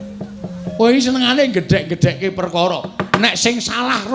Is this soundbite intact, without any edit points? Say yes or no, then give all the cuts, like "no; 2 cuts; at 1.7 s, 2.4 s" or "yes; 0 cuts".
yes; 0 cuts